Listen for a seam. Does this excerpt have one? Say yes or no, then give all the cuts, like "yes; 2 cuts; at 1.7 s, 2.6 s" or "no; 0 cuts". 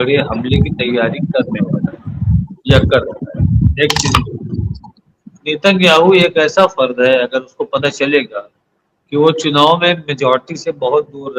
yes; 1 cut; at 4.6 s